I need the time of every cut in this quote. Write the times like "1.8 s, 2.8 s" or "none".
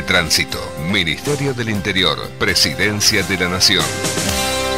none